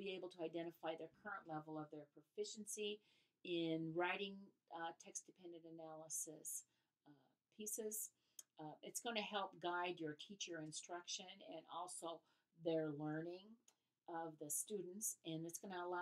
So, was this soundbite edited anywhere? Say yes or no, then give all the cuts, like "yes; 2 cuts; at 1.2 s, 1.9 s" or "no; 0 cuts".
no; 0 cuts